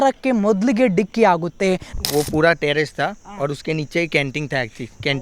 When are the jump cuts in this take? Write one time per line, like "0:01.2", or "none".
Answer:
0:01.9